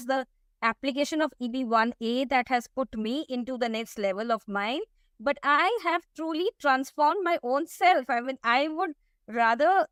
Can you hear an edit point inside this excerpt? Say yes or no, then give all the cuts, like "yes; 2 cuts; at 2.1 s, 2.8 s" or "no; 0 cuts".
no; 0 cuts